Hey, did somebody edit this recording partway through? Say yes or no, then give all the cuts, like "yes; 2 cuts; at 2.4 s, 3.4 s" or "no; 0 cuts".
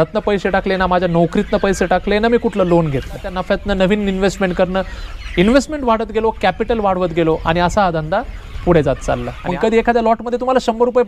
yes; 2 cuts; at 3.3 s, 9.3 s